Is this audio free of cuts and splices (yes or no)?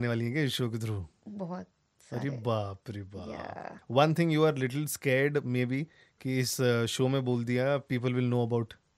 no